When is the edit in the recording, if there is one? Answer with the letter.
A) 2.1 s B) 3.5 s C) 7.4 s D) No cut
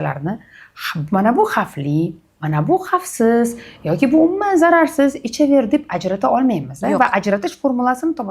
D